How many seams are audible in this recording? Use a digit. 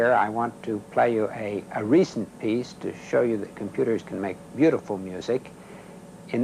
1